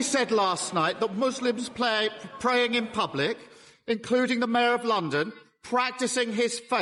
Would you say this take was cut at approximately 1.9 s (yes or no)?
no